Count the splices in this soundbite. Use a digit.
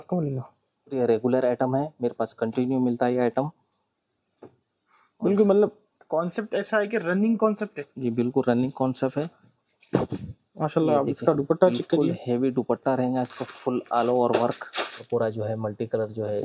2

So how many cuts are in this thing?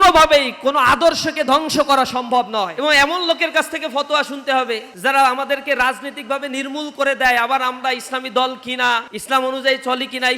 1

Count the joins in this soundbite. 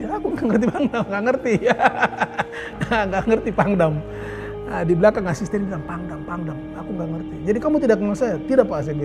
0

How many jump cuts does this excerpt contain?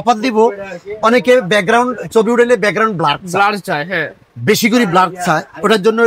0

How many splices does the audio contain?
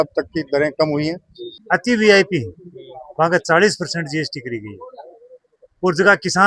1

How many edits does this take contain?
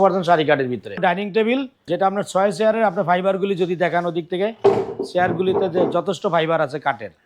2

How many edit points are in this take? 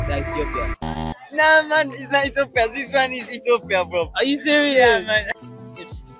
2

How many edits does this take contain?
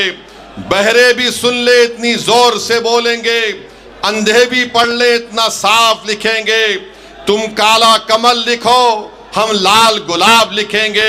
0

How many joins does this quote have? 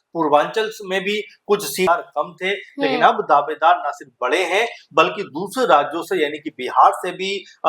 1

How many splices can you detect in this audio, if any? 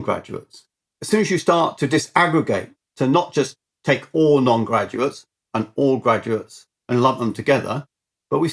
2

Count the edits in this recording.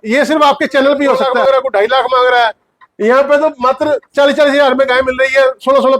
0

